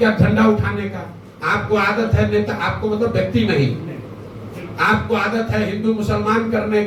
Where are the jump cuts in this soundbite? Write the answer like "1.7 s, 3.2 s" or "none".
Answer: none